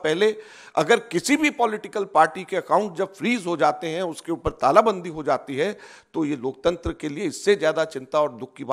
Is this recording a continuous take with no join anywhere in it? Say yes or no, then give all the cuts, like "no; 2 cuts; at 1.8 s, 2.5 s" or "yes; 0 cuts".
yes; 0 cuts